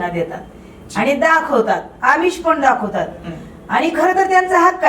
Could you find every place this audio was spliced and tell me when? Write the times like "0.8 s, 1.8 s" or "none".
none